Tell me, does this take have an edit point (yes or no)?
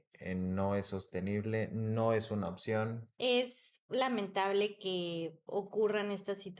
yes